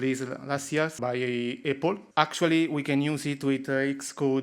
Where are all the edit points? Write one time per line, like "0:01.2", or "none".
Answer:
0:01.0
0:02.0